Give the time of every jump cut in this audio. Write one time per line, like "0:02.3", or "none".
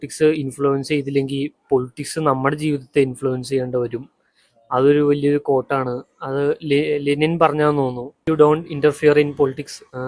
0:08.1